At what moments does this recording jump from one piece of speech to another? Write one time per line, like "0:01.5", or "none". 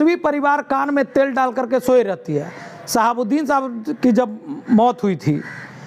none

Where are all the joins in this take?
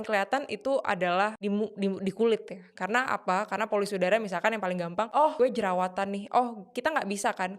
0:01.4
0:05.2

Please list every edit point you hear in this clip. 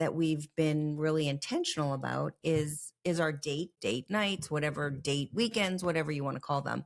0:03.7

